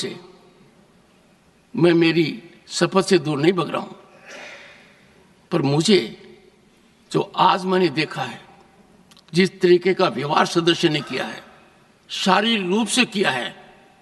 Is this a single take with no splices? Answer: yes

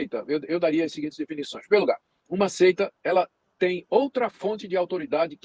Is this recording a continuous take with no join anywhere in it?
yes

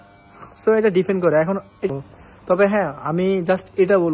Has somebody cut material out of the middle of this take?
yes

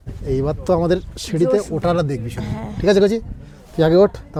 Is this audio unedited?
yes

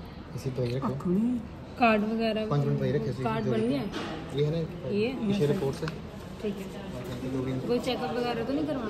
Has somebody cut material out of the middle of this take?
no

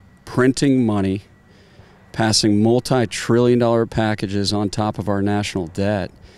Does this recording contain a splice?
no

